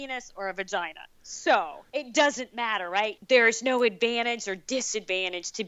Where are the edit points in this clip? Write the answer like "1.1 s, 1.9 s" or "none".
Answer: 1.8 s, 3.2 s

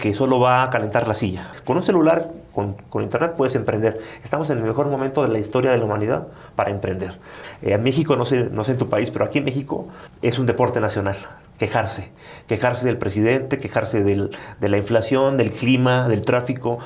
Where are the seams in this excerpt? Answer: 1.5 s, 7.4 s

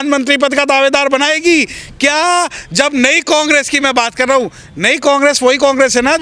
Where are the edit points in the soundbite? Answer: none

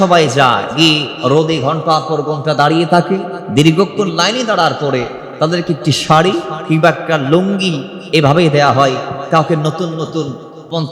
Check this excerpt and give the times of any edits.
1.0 s

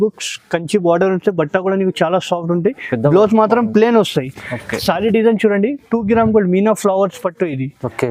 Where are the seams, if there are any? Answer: none

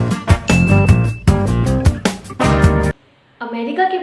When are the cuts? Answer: 3.1 s

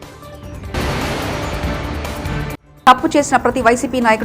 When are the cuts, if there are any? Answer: 0.7 s, 2.6 s

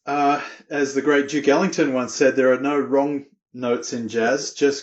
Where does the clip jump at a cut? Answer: none

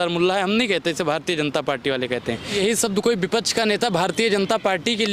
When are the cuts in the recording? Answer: 2.5 s

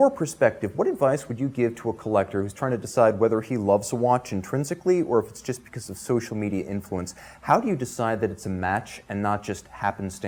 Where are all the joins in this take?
none

